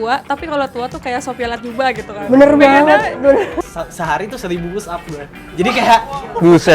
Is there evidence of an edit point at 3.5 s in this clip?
yes; 1 cut; at 3.5 s

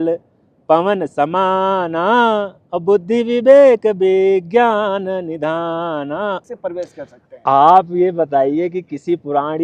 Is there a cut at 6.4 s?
yes; 1 cut; at 6.4 s

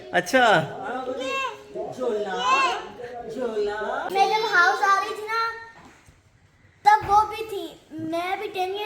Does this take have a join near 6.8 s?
no; 1 cut; at 4.1 s

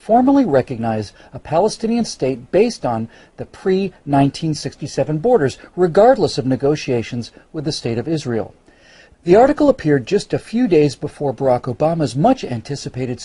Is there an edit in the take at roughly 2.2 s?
yes; 1 cut; at 2.2 s

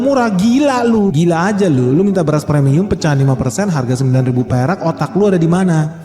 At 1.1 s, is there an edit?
yes; 1 cut; at 1.1 s

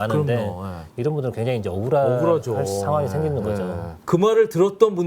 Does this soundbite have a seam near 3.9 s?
yes; 1 cut; at 3.9 s

